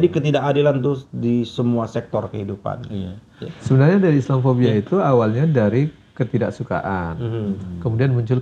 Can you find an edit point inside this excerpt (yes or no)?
yes